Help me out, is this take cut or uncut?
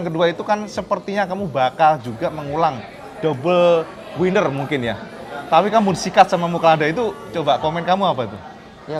uncut